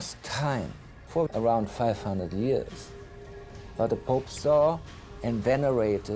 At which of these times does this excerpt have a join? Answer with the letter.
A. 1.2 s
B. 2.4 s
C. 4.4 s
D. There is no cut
A